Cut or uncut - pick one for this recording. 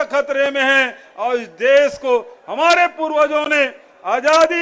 uncut